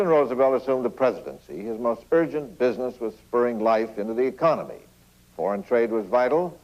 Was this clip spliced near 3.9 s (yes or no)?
yes